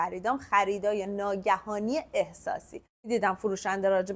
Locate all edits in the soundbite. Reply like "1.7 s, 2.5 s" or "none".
2.9 s

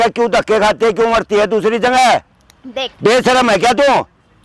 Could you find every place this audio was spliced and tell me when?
none

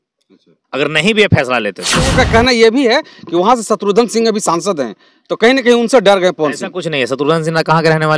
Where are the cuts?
2.1 s

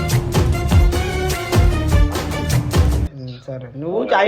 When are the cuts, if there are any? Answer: 3.0 s

